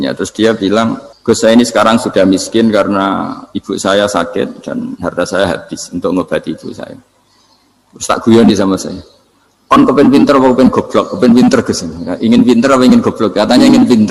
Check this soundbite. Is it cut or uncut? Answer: cut